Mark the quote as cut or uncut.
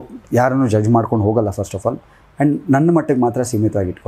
uncut